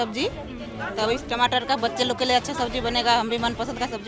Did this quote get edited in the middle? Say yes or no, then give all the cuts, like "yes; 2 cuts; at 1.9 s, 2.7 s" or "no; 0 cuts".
no; 0 cuts